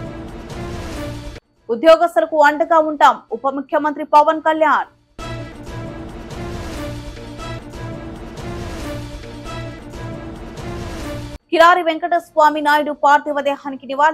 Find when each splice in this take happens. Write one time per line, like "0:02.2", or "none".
0:01.3

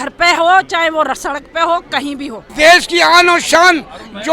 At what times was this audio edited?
0:02.4

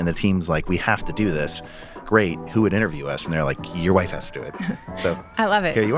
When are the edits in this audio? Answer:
0:02.0
0:04.9

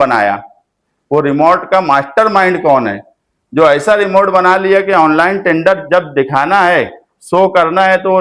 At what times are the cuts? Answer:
none

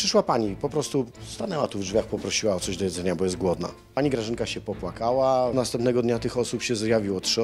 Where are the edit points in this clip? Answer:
0:03.8
0:05.5

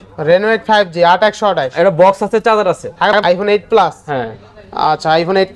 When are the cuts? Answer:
0:03.2

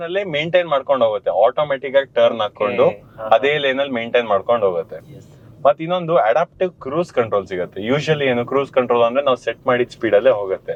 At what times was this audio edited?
none

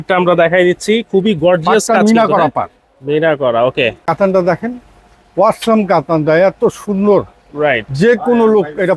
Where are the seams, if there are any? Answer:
0:04.0

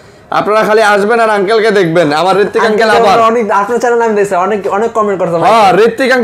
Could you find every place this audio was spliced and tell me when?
none

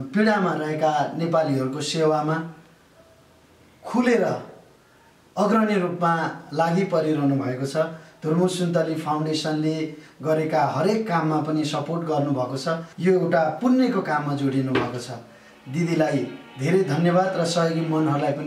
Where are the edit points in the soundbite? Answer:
0:12.9

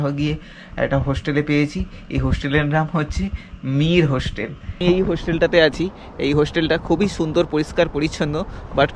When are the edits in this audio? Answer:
0:04.8

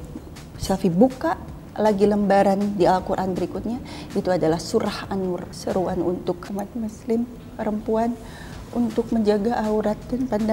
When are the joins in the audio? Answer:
0:05.5
0:06.4

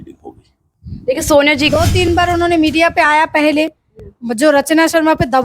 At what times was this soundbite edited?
0:01.7

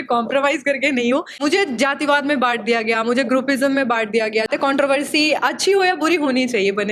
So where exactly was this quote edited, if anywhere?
0:01.4
0:04.5

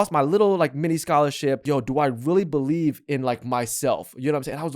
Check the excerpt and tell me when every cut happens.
0:01.6

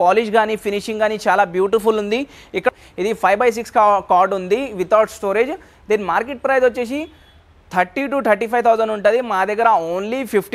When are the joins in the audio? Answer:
0:02.7

